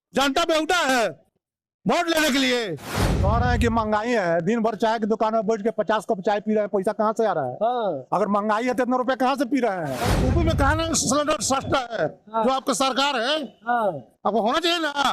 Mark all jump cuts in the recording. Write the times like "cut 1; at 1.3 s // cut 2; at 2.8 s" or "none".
cut 1; at 3.2 s // cut 2; at 10.1 s